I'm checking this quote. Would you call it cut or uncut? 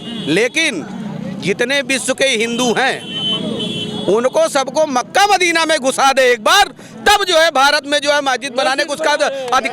uncut